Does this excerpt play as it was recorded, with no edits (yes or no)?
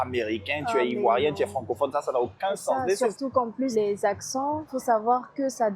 no